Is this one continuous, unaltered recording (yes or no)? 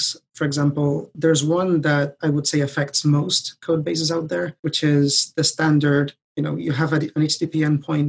no